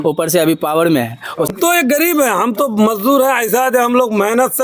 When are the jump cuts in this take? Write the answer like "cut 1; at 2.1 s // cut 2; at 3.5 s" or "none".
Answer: cut 1; at 1.5 s